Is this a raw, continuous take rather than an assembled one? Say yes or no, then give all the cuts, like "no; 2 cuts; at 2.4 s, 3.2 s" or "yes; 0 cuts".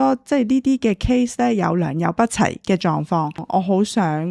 no; 2 cuts; at 2.6 s, 3.4 s